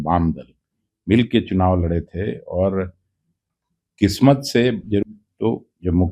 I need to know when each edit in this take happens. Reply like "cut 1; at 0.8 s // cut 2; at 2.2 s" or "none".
cut 1; at 5.0 s